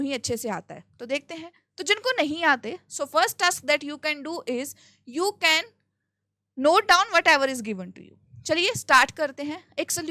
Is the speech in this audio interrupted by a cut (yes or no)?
no